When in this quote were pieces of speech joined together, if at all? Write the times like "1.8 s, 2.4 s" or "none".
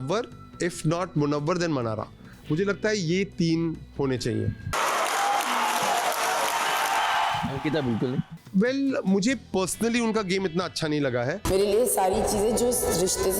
4.7 s, 7.4 s, 8.3 s